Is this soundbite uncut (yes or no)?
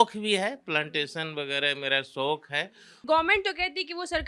no